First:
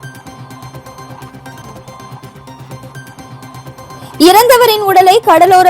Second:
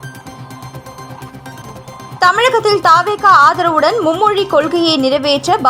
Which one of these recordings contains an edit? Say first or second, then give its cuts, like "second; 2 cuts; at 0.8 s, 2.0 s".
first; 1 cut; at 1.9 s